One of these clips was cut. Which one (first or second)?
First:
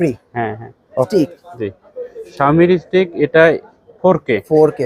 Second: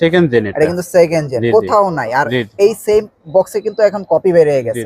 first